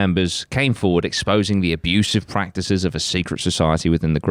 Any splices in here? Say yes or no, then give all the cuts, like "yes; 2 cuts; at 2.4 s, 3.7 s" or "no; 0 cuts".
no; 0 cuts